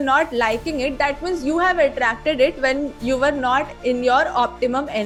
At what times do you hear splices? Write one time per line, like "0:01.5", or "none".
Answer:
none